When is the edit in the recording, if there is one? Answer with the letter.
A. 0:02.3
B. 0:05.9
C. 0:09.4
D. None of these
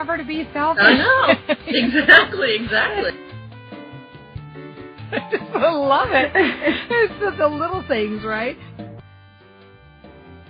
C